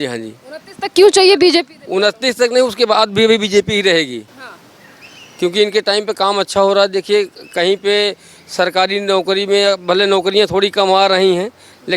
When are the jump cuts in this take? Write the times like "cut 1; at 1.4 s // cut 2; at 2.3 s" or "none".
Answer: none